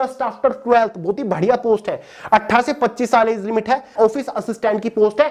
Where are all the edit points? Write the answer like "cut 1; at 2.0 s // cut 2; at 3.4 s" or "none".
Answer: cut 1; at 3.9 s